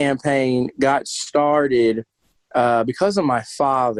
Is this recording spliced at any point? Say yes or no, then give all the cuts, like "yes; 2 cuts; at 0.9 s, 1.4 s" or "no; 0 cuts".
no; 0 cuts